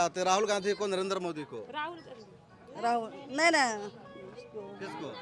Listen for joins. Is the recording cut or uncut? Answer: uncut